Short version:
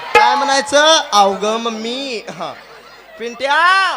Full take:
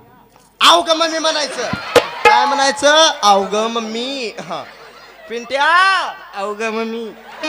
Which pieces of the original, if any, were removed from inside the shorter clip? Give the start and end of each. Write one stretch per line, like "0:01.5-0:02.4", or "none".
none

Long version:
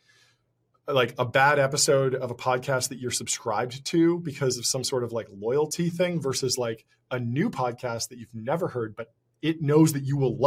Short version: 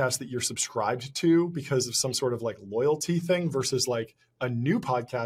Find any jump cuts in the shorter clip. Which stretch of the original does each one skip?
none

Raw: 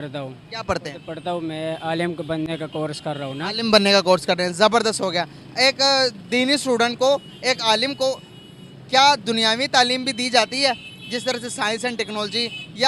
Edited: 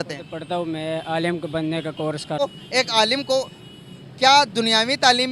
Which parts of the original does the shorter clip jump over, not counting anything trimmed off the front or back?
0:03.2-0:07.1

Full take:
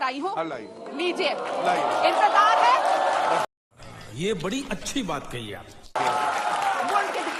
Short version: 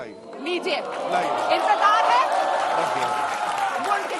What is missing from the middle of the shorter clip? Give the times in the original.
0:03.5-0:06.0

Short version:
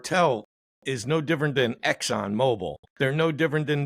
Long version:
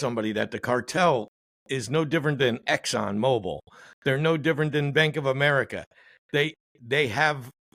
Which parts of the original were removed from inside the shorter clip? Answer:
0:03.6-0:03.8

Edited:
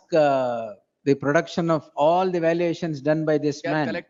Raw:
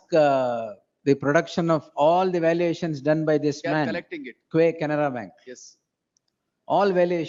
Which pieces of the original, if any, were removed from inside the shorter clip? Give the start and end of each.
none

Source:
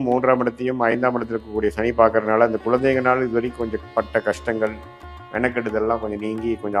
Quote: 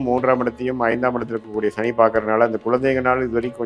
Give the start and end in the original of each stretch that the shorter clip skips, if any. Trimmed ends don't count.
none

